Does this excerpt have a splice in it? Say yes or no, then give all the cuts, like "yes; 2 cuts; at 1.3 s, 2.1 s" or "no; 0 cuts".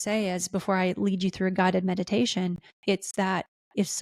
yes; 1 cut; at 2.7 s